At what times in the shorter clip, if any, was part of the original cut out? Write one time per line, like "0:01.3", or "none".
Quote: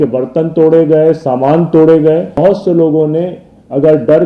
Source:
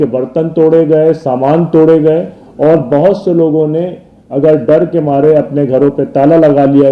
0:02.4